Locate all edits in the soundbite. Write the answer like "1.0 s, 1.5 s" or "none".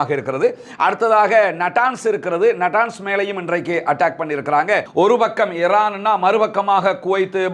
4.9 s